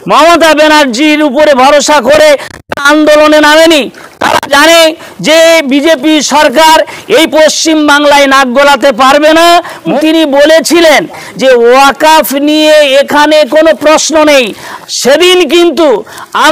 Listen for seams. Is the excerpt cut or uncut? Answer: cut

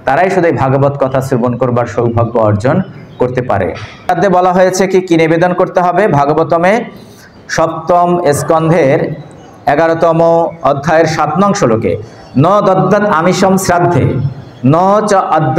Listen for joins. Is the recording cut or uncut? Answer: cut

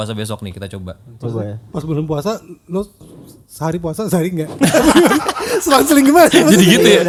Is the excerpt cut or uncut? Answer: uncut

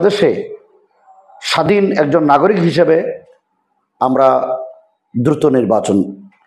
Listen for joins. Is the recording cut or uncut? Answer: uncut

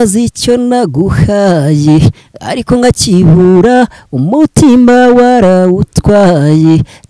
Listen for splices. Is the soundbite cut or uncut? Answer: uncut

